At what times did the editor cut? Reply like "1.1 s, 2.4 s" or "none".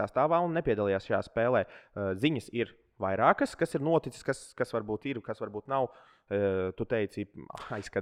none